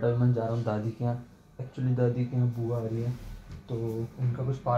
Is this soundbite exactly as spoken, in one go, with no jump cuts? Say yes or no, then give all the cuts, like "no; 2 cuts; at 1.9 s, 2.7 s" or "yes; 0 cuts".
yes; 0 cuts